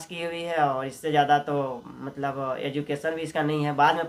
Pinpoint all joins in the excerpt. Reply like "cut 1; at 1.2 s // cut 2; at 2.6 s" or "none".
none